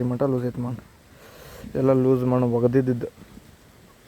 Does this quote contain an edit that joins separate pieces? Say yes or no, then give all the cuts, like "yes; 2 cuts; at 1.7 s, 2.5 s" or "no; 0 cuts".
no; 0 cuts